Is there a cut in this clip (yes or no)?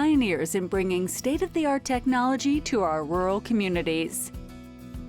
yes